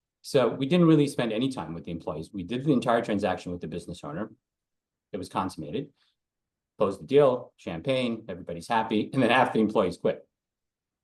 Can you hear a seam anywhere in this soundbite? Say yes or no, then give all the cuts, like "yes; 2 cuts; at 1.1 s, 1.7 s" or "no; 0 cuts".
no; 0 cuts